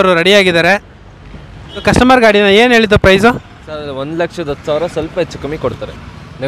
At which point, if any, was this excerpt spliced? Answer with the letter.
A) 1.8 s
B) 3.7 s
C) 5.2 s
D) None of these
A